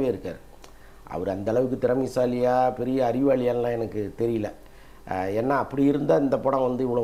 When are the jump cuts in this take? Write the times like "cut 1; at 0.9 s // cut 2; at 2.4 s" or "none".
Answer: none